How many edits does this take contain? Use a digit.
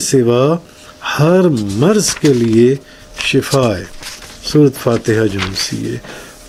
0